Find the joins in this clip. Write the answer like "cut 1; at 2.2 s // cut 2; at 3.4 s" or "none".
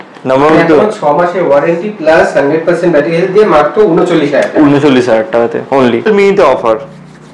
cut 1; at 6.1 s